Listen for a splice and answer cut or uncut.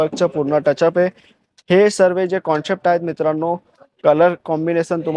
uncut